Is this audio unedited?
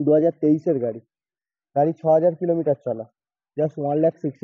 yes; 0 cuts

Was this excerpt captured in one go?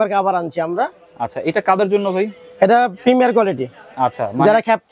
yes; 0 cuts

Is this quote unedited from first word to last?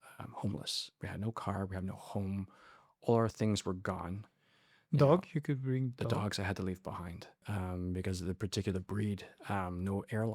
no; 1 cut; at 7.4 s

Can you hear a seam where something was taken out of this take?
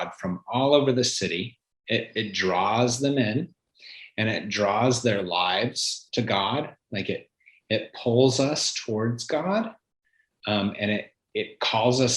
no; 0 cuts

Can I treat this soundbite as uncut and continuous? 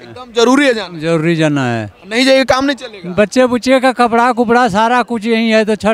yes; 0 cuts

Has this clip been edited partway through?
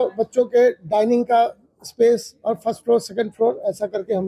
no; 0 cuts

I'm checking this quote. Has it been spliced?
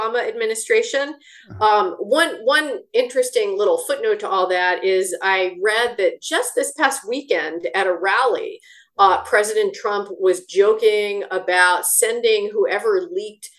no; 0 cuts

